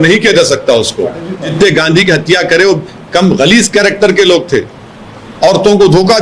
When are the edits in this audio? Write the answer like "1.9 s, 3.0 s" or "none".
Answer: 1.5 s